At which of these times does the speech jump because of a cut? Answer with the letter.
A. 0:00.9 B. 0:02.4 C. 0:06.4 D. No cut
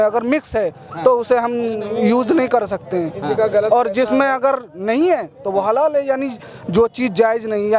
D